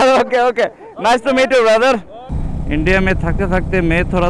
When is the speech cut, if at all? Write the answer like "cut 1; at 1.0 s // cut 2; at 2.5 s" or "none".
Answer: cut 1; at 2.1 s

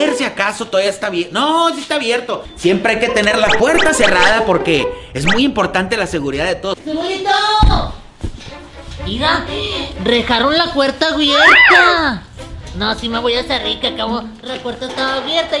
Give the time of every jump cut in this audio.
cut 1; at 2.4 s // cut 2; at 6.8 s

